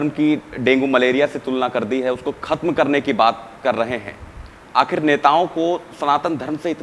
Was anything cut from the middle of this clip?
no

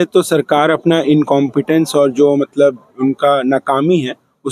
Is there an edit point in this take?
no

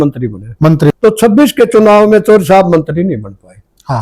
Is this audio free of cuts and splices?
no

